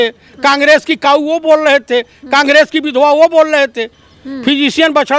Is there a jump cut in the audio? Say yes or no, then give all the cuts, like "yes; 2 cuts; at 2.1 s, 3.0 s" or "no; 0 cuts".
no; 0 cuts